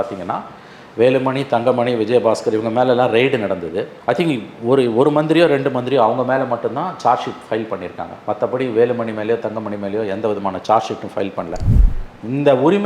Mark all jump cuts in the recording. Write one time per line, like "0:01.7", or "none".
0:11.6